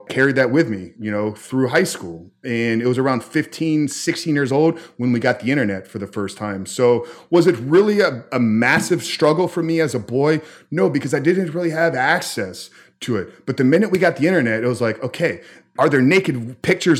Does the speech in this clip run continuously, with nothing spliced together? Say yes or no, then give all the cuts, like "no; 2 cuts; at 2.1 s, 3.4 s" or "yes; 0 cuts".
yes; 0 cuts